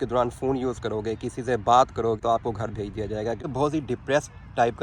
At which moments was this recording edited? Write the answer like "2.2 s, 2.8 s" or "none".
2.2 s, 3.4 s